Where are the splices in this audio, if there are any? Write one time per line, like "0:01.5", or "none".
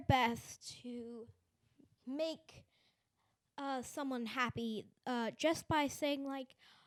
none